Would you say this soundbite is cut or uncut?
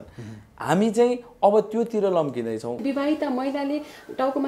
cut